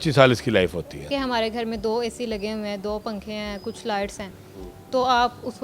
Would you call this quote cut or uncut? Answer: cut